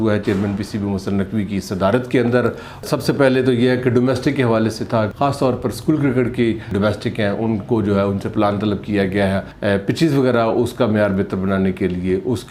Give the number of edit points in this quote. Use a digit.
4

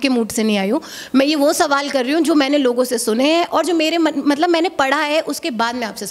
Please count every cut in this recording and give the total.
0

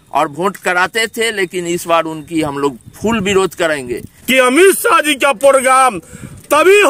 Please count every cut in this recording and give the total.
1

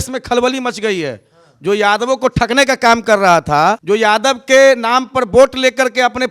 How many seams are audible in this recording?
1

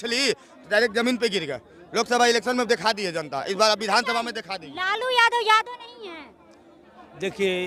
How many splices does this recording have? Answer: 0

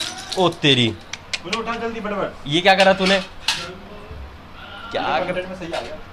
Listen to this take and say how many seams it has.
0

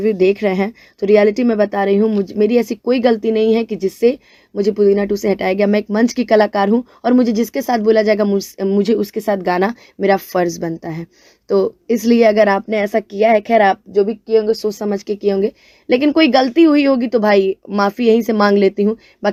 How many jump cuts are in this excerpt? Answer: 0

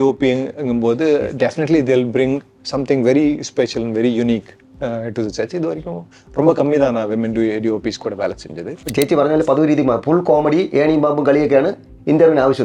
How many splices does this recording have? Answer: 1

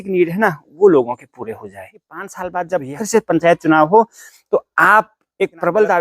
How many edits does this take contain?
1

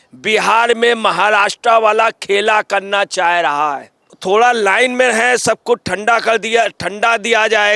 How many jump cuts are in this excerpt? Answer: 1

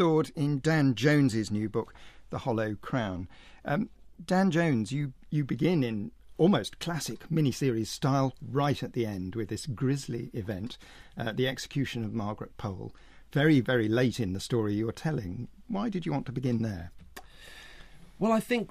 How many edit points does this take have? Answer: 1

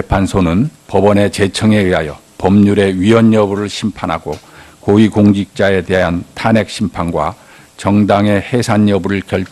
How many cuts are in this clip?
1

